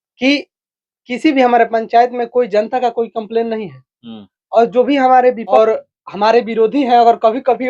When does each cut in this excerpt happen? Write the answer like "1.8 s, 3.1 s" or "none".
5.6 s

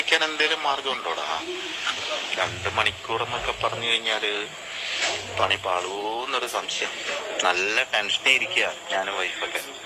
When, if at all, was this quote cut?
none

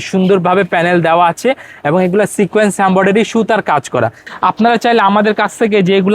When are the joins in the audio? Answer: 4.2 s

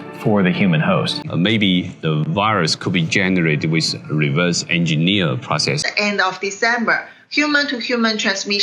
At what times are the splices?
1.3 s, 5.9 s

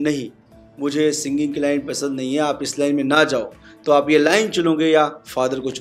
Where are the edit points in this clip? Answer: none

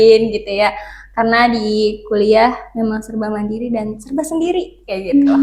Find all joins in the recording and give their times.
none

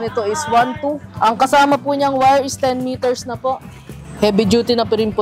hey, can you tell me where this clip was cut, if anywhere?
1.1 s

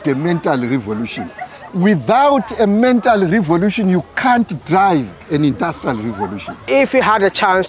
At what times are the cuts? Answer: 6.7 s

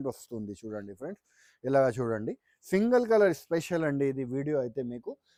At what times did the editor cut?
none

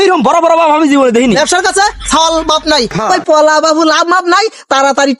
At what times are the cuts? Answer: 1.4 s, 2.9 s

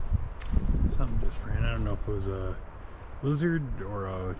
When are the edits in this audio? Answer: none

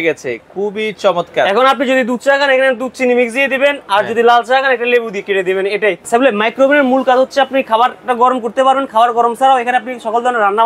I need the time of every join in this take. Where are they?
6.0 s

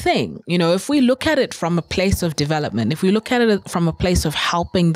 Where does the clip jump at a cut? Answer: none

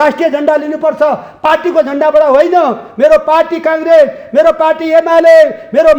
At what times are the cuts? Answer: none

